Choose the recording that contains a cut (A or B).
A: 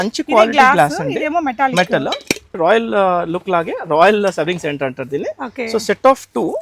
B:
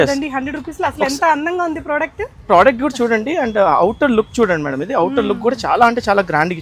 A